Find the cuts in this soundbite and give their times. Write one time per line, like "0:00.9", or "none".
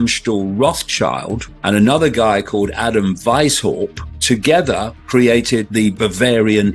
0:01.5
0:04.1
0:05.7